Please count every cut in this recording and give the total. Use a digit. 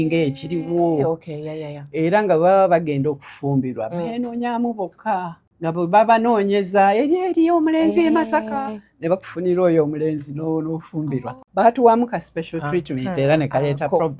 2